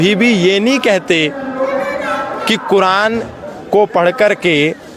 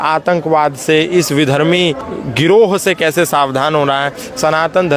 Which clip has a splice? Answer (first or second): second